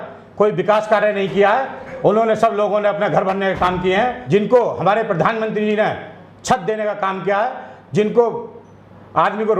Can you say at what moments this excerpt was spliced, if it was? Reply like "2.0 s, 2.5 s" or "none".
4.2 s